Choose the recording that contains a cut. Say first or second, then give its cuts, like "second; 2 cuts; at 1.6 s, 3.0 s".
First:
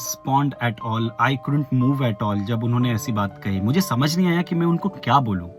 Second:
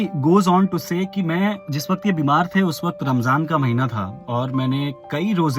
second; 2 cuts; at 1.7 s, 4.1 s